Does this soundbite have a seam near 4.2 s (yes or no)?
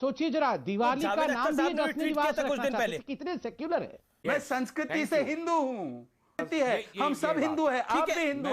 yes